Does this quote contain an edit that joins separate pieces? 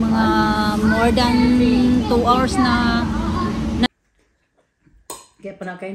yes; 1 cut; at 3.9 s

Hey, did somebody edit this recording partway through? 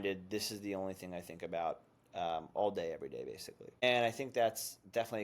yes; 1 cut; at 3.8 s

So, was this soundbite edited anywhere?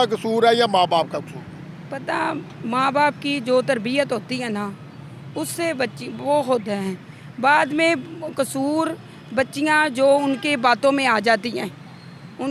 no; 0 cuts

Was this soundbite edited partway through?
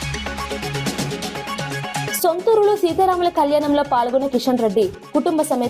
yes; 1 cut; at 2.1 s

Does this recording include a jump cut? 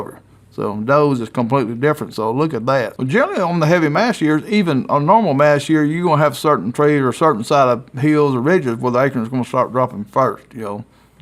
yes; 1 cut; at 2.9 s

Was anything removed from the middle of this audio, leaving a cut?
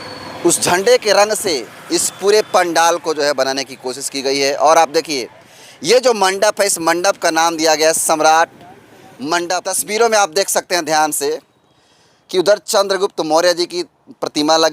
yes; 1 cut; at 9.7 s

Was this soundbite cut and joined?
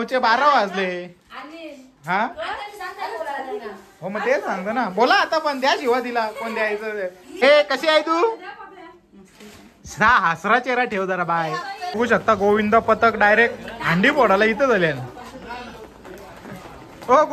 yes; 2 cuts; at 7.3 s, 11.8 s

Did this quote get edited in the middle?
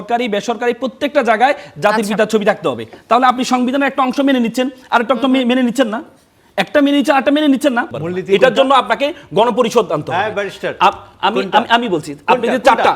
yes; 1 cut; at 8.0 s

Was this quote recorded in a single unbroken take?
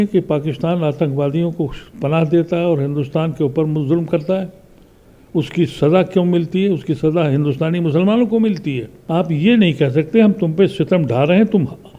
no; 1 cut; at 8.9 s

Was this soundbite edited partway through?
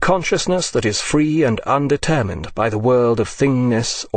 yes; 1 cut; at 2.4 s

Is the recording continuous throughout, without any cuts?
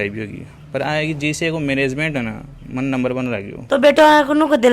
no; 1 cut; at 3.5 s

